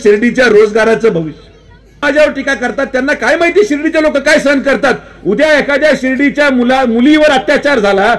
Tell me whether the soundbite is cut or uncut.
cut